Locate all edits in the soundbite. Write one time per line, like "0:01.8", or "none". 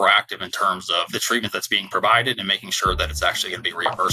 0:01.1